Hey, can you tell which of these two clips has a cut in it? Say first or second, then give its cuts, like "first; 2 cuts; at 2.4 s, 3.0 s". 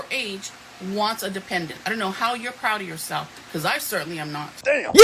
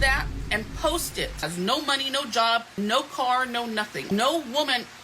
second; 3 cuts; at 1.5 s, 2.7 s, 4.1 s